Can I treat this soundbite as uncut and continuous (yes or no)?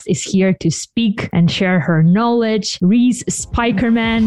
yes